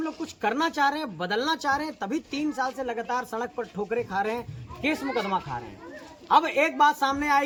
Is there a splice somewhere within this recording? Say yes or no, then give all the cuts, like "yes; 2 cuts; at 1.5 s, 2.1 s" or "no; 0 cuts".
no; 0 cuts